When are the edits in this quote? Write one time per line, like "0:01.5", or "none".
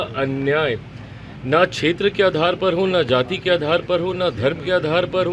none